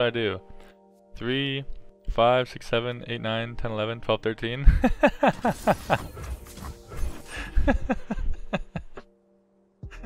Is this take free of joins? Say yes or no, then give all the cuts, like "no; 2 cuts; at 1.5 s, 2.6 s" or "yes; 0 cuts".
yes; 0 cuts